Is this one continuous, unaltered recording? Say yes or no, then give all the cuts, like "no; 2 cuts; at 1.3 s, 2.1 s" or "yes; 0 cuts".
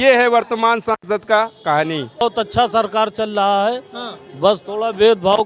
no; 1 cut; at 2.2 s